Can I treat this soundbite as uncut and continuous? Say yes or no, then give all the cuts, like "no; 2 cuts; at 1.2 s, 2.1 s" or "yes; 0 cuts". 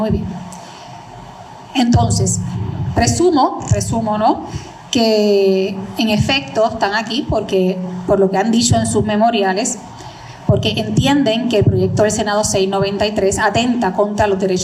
yes; 0 cuts